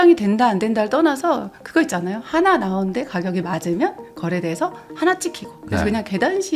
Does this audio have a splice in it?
no; 0 cuts

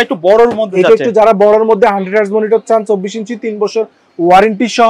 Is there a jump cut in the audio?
no; 0 cuts

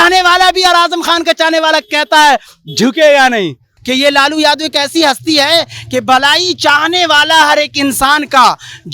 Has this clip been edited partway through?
yes; 1 cut; at 3.7 s

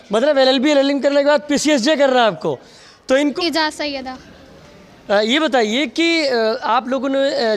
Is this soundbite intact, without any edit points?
no; 1 cut; at 3.3 s

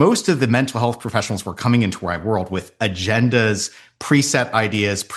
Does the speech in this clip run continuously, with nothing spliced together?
yes; 0 cuts

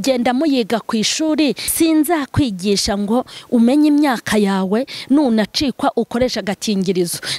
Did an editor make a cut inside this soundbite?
yes; 1 cut; at 1.6 s

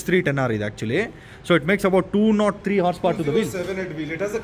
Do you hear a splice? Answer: no; 0 cuts

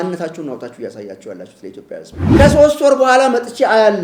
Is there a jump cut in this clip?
yes; 1 cut; at 2.4 s

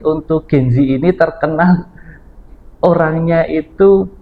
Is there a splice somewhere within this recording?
no; 0 cuts

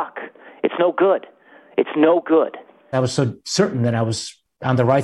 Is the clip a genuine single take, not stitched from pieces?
no; 1 cut; at 2.9 s

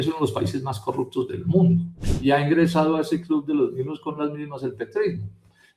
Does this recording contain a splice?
yes; 1 cut; at 2.1 s

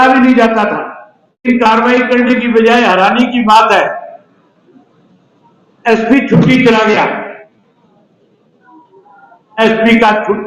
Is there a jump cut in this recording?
yes; 1 cut; at 1.5 s

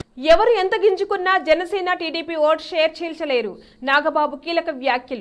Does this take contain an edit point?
no; 0 cuts

